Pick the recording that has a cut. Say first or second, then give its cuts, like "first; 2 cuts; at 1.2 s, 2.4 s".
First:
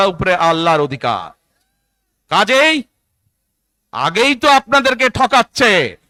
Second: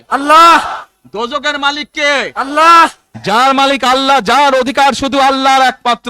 second; 1 cut; at 3.1 s